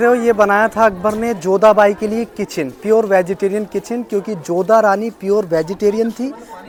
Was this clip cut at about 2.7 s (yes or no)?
no